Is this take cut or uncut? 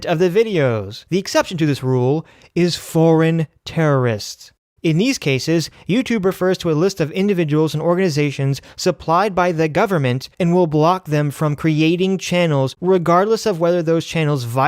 cut